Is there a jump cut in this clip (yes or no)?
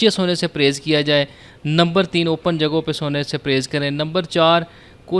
no